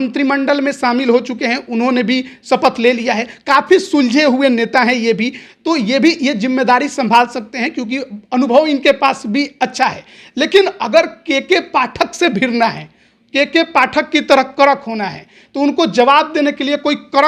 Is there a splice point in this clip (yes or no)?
no